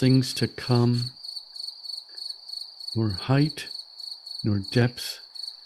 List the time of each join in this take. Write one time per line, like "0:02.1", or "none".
0:01.2
0:02.9